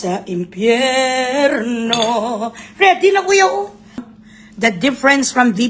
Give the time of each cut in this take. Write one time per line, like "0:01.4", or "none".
0:04.1